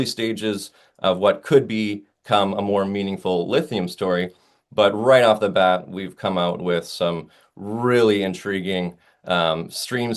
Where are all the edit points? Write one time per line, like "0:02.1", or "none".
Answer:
none